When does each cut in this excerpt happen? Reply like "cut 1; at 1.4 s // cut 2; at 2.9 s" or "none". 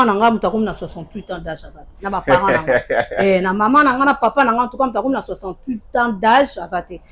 none